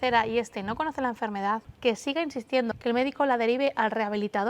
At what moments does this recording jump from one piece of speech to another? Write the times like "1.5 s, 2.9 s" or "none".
1.7 s, 2.7 s